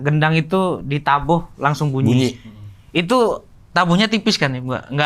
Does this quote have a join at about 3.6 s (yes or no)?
no